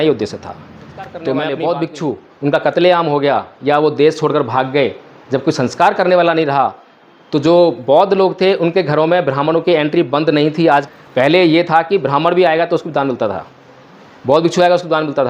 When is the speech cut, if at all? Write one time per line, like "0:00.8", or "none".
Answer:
0:01.2
0:10.9